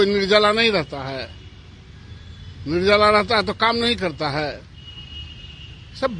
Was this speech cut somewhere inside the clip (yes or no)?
no